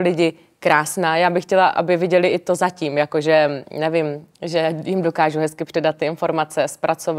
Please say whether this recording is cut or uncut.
uncut